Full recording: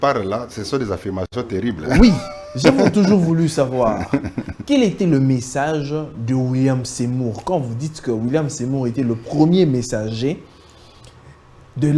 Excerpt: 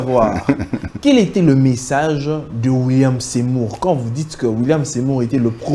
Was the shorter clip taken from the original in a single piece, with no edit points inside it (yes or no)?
yes